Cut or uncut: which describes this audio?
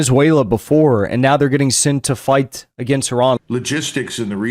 cut